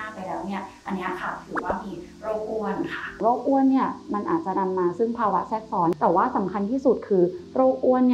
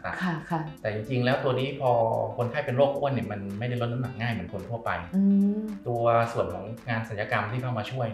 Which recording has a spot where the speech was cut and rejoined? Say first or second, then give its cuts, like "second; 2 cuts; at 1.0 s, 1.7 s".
first; 2 cuts; at 3.0 s, 6.0 s